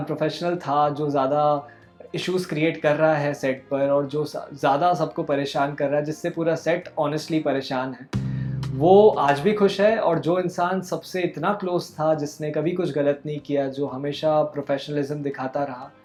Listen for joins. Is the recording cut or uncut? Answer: uncut